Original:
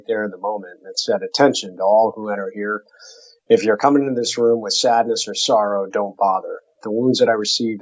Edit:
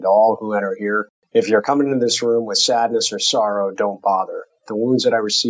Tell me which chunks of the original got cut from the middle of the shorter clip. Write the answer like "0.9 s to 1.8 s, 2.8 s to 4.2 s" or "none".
2.9 s to 3.3 s